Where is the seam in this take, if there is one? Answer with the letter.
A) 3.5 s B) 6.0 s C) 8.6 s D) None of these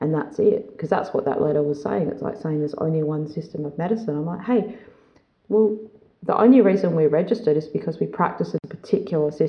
C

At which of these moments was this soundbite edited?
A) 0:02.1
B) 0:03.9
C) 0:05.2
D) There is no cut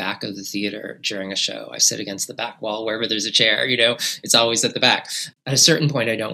C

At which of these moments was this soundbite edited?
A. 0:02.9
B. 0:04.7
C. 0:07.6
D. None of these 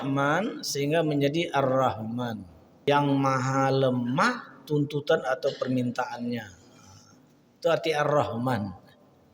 A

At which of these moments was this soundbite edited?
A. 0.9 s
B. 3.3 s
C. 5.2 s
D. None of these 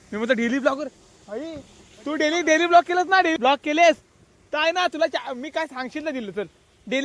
B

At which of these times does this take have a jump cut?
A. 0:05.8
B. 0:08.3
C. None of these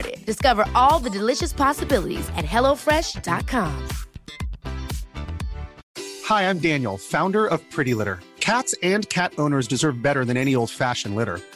A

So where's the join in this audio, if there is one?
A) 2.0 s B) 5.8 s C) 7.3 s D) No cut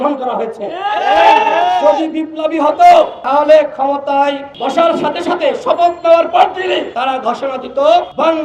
D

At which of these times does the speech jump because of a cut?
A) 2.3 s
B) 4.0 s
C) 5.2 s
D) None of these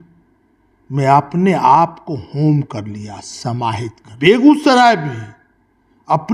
B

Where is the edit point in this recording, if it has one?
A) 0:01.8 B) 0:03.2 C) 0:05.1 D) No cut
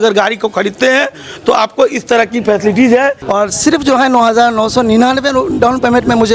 B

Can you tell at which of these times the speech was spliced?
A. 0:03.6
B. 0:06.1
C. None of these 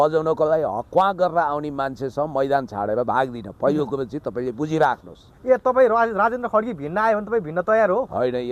C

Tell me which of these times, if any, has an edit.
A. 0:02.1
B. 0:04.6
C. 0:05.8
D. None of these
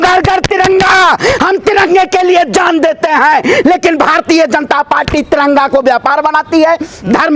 D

